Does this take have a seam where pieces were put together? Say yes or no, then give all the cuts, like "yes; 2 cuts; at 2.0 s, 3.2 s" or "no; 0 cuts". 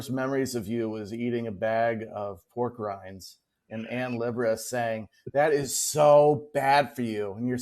no; 0 cuts